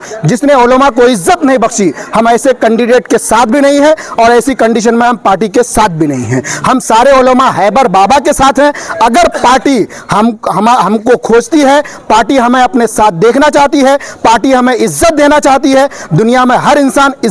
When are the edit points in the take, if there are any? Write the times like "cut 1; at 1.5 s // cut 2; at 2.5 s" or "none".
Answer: none

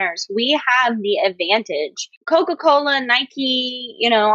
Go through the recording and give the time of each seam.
cut 1; at 2.1 s

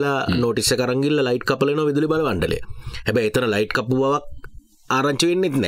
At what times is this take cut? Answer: none

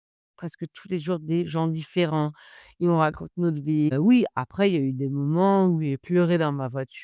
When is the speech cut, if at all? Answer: cut 1; at 3.9 s

